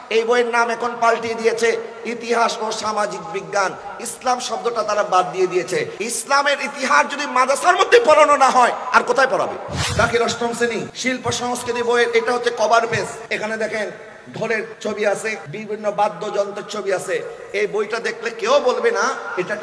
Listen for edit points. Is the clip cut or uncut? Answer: cut